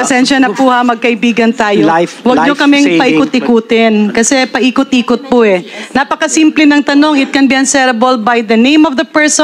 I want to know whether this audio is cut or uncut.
uncut